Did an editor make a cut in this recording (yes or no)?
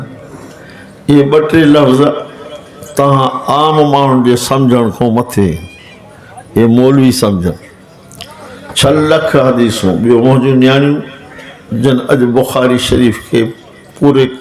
no